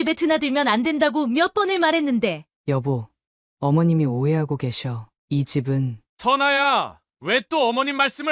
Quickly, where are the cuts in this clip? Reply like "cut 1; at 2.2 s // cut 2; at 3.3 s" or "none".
cut 1; at 2.5 s // cut 2; at 6.0 s